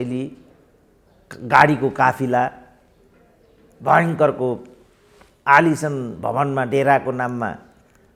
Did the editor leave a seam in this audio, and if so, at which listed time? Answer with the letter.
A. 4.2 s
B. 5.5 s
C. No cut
C